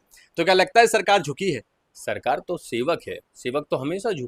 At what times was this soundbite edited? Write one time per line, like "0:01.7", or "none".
none